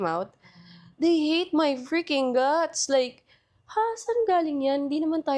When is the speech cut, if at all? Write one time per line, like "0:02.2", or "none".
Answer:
none